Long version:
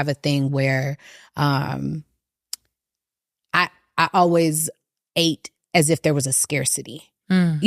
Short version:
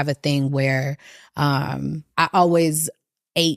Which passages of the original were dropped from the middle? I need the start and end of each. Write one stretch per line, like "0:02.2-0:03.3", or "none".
0:02.0-0:03.8